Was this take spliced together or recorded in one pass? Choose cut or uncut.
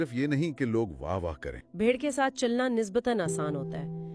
cut